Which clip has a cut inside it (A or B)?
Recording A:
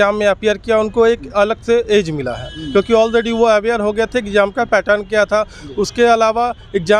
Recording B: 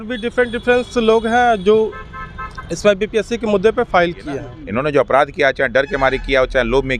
B